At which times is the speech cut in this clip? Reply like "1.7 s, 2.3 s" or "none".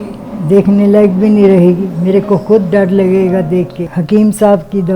3.8 s